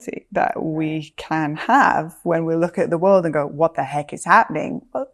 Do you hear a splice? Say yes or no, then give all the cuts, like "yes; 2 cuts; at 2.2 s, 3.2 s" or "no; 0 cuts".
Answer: no; 0 cuts